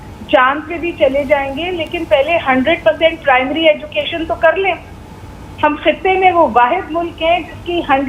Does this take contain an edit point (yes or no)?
no